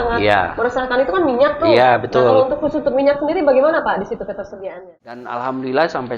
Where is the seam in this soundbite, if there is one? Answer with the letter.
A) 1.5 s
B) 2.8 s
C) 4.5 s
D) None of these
C